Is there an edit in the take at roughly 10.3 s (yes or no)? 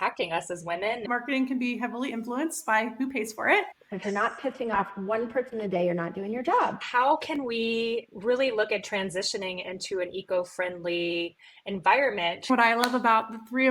no